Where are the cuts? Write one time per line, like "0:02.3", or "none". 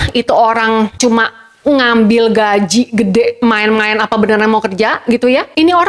none

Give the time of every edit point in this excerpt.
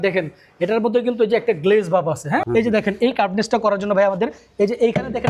0:02.5

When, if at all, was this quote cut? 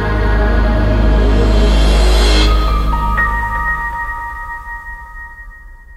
none

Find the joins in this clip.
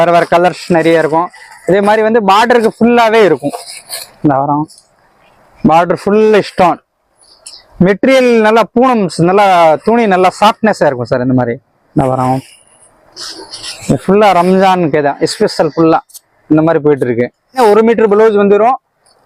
0:17.6

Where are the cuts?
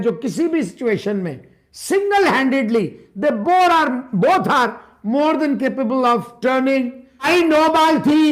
0:07.3

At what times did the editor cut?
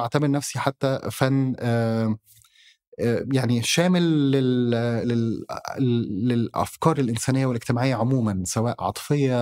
none

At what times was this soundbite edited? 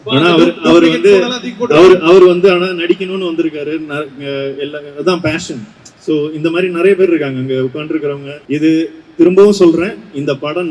0:08.3

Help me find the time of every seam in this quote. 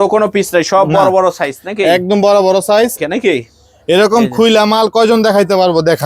0:03.0

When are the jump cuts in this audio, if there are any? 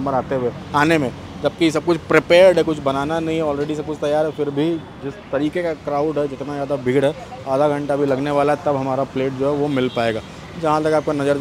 none

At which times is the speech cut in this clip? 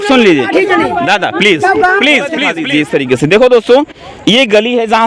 0:02.5

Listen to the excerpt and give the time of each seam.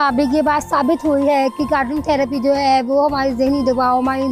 none

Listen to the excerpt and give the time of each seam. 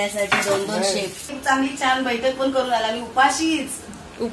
0:01.3

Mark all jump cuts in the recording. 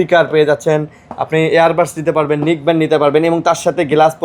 none

